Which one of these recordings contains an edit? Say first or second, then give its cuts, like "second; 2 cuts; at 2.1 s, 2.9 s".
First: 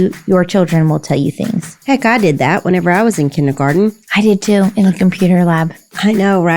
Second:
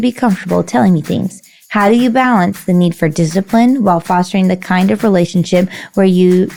first; 1 cut; at 4.0 s